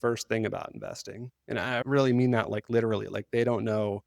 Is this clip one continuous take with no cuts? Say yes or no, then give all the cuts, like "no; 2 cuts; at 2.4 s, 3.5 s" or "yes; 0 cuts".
no; 1 cut; at 1.8 s